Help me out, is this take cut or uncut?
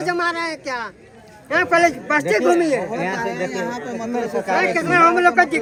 uncut